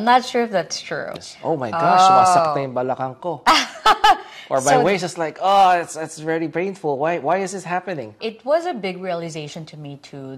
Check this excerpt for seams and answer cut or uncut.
cut